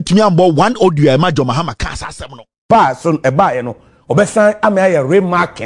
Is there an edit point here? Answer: yes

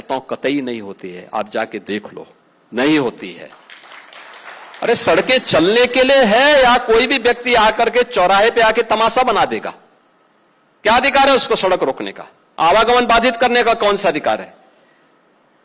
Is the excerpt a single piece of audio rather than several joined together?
yes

